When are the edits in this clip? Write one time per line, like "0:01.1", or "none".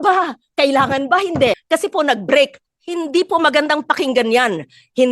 0:01.6